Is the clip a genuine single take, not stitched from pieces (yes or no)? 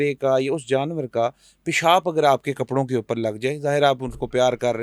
yes